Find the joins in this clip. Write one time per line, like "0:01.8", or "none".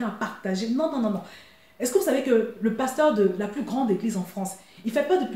none